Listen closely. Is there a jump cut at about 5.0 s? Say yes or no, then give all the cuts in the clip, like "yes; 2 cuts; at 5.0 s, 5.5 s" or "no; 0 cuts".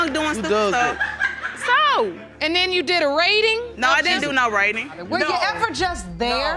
yes; 2 cuts; at 3.7 s, 5.0 s